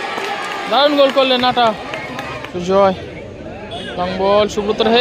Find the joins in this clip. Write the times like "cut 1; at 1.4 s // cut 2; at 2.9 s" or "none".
cut 1; at 2.4 s